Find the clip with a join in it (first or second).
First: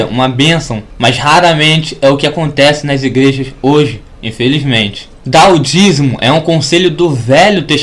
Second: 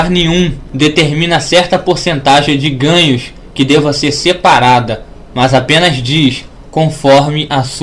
first